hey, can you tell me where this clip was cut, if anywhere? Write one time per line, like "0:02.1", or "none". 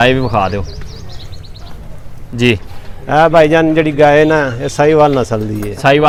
none